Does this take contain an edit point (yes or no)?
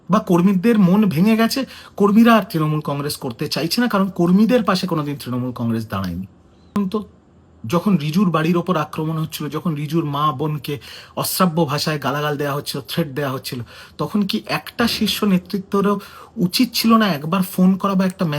yes